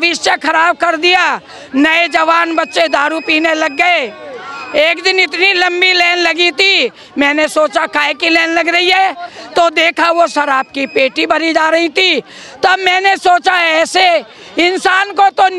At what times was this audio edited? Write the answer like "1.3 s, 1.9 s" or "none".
none